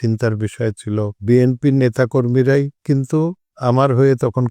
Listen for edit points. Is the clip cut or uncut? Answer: cut